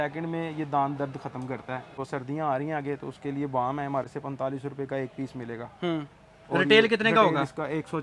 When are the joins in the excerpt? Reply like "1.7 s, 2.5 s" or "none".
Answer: 2.0 s, 4.1 s